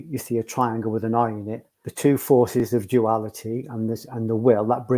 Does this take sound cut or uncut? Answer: cut